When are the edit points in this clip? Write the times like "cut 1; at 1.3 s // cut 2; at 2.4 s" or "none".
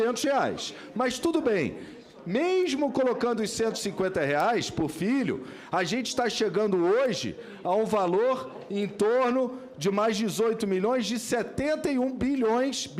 none